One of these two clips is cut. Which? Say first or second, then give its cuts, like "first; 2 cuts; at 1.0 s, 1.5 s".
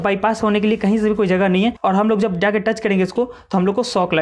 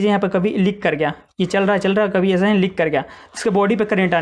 first; 1 cut; at 1.8 s